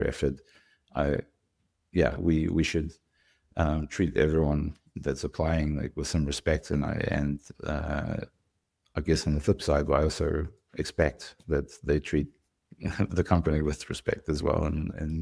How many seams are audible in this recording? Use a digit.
0